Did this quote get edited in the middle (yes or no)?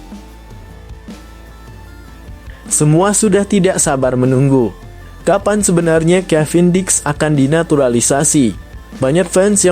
no